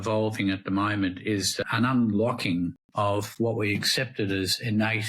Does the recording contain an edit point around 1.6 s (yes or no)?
yes